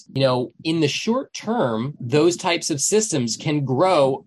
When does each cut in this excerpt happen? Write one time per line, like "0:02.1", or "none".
0:01.9